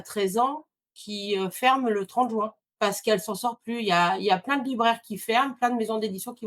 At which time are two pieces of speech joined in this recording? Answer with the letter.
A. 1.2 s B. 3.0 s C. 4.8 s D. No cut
B